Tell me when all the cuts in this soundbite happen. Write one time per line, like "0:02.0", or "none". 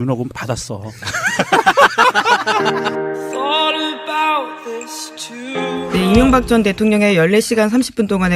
0:02.5